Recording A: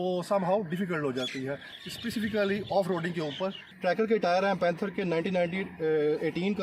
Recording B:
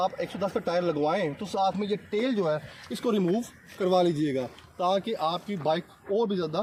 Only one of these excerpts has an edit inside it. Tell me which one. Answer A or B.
A